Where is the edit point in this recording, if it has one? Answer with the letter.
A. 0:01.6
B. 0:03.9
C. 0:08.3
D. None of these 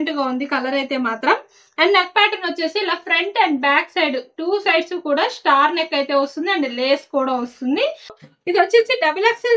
C